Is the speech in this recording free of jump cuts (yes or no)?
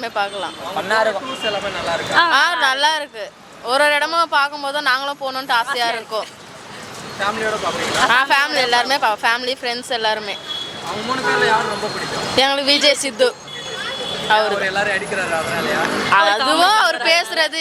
yes